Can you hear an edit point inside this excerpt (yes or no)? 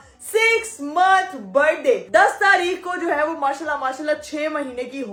no